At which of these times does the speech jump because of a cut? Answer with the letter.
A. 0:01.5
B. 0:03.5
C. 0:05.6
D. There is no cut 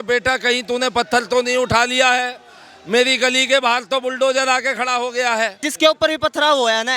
C